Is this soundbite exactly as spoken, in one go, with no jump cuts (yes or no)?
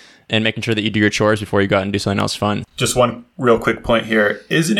no